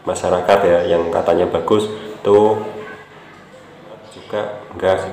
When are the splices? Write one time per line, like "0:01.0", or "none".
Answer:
0:04.2